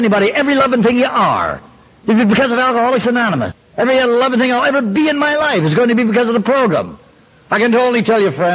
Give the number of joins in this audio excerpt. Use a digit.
1